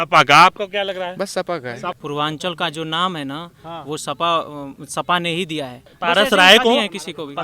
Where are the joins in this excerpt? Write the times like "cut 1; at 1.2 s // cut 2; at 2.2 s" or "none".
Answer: cut 1; at 2.0 s // cut 2; at 5.9 s